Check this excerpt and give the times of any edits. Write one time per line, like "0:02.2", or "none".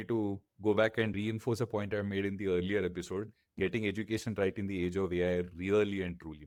none